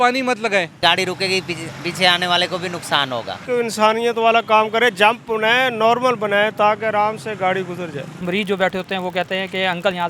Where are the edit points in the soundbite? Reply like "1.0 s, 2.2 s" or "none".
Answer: 0.8 s, 3.4 s, 8.2 s

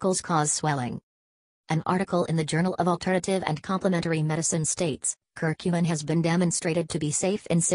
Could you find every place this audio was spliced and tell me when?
1.1 s

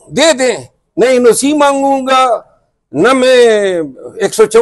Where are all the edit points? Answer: none

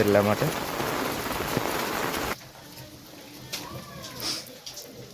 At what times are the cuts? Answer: 2.3 s

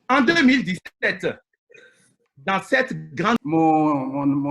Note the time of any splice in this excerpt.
3.4 s

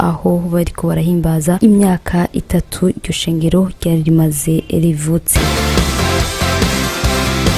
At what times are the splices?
5.3 s

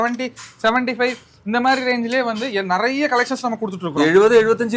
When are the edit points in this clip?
none

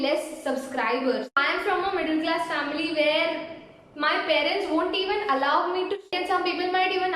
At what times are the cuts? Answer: 1.3 s, 6.1 s

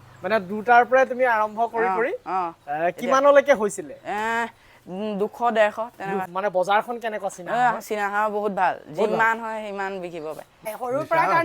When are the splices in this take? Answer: 6.2 s, 10.7 s

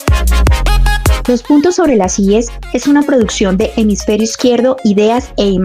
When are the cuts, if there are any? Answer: 1.2 s

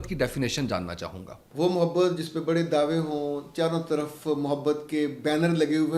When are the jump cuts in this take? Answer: 1.4 s

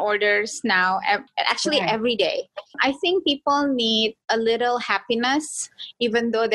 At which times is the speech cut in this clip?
1.3 s, 2.7 s, 4.2 s

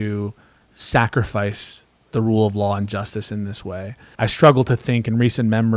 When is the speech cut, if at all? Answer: 4.0 s

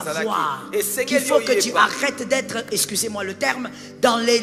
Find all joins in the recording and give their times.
none

